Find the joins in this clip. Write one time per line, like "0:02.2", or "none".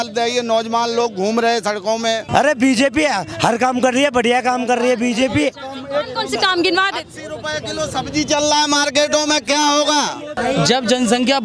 0:02.2
0:10.3

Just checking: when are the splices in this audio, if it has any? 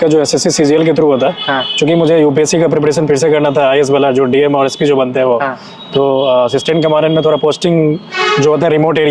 none

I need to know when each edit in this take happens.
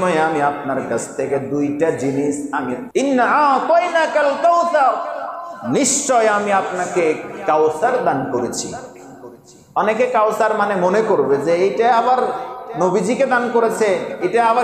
0:02.8

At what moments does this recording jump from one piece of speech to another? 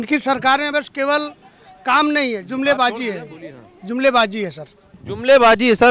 none

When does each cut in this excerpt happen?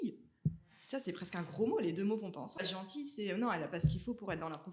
0:02.6

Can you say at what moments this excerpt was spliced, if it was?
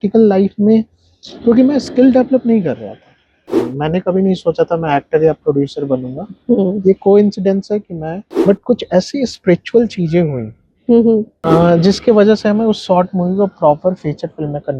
0:03.4
0:08.2
0:11.3

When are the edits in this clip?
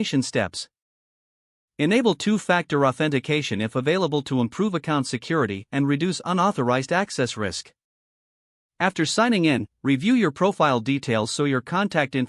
none

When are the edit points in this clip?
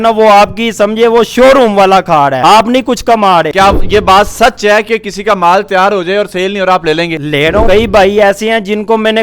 0:03.5
0:07.7

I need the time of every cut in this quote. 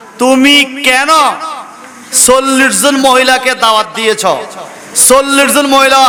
none

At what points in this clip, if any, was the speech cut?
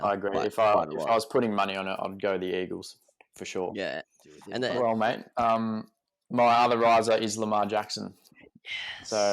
0:04.6

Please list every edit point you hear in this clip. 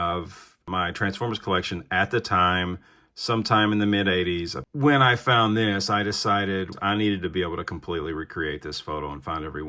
0:04.6
0:06.8

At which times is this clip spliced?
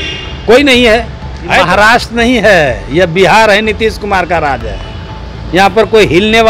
0:01.6

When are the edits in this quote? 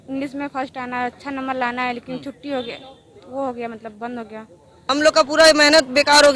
0:04.8

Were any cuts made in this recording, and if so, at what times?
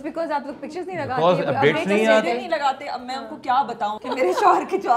0:04.0

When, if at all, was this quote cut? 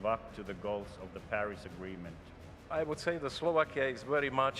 0:02.7

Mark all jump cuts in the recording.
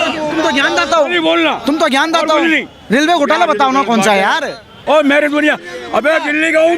0:04.8

